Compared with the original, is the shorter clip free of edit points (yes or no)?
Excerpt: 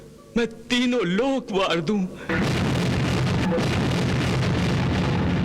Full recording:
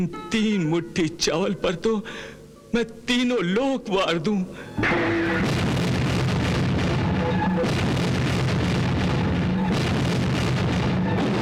no